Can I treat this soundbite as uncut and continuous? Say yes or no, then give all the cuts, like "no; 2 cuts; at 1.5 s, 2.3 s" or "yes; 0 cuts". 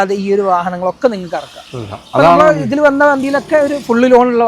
yes; 0 cuts